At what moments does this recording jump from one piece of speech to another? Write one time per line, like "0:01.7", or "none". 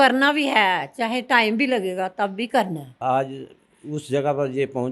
0:03.0